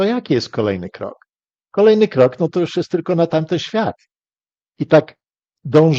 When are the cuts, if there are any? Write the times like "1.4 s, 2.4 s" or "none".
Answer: none